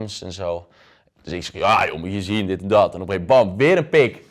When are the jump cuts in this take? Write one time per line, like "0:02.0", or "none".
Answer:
none